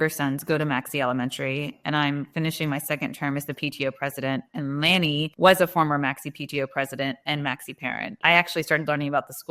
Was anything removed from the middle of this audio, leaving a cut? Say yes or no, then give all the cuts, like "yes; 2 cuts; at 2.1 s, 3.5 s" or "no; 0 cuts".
yes; 2 cuts; at 5.3 s, 8.2 s